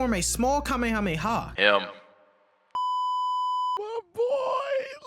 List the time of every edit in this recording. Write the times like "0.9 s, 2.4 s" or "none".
1.5 s